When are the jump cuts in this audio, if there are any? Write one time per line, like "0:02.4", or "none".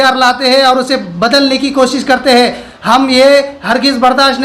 none